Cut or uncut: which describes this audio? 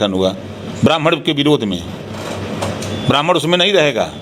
uncut